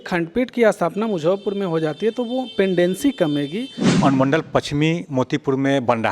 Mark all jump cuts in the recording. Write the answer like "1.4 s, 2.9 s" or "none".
3.9 s